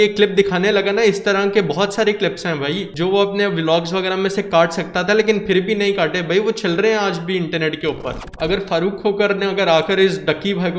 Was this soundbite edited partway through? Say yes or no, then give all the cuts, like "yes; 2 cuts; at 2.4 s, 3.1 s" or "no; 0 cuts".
yes; 2 cuts; at 2.9 s, 8.2 s